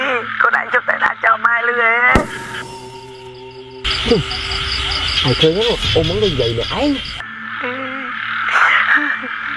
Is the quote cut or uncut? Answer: cut